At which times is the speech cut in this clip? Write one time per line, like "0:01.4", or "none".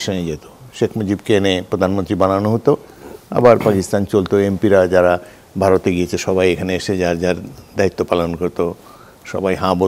none